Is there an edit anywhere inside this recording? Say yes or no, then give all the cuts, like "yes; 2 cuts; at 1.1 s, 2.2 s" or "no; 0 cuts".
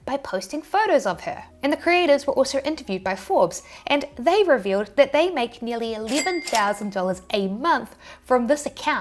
no; 0 cuts